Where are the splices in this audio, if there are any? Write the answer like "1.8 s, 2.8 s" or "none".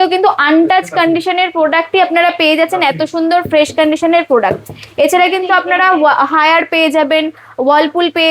none

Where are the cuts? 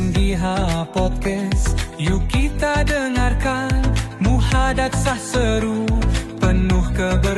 none

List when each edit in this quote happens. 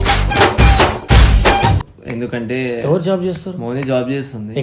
1.8 s

